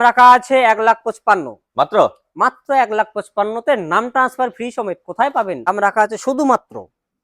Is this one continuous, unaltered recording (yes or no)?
no